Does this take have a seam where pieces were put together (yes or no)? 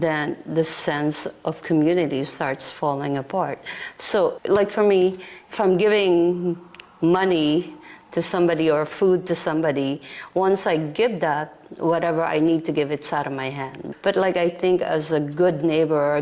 no